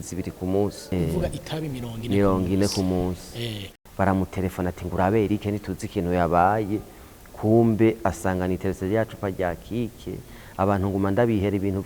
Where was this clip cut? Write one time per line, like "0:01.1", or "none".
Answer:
0:00.9
0:03.7